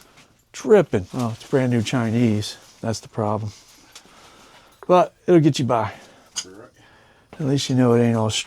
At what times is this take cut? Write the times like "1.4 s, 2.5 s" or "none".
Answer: 1.1 s